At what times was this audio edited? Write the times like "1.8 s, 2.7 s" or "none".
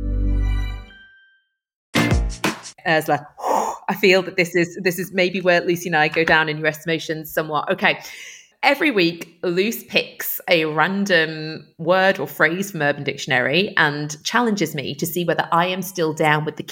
none